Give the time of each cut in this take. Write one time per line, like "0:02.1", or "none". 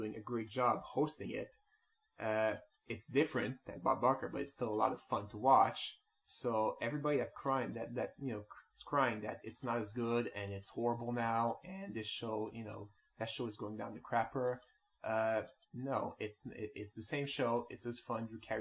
0:13.4